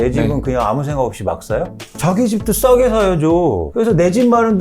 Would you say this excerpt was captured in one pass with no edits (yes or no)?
no